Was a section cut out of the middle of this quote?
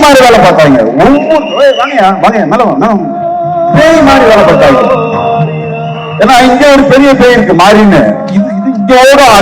no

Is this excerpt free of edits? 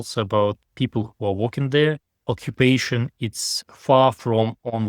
no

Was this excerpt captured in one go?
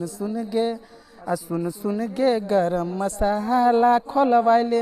yes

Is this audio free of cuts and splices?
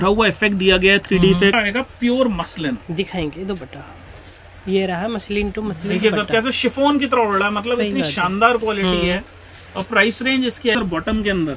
no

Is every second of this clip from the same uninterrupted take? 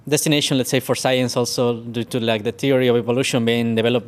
yes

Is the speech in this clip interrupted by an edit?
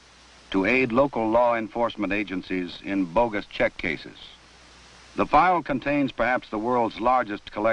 yes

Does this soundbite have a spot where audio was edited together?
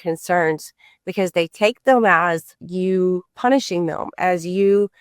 yes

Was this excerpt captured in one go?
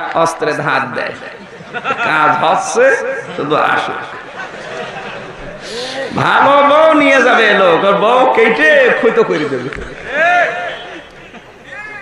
yes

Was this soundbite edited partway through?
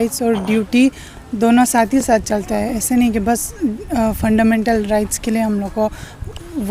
no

